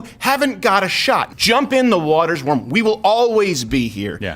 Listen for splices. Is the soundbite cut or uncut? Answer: cut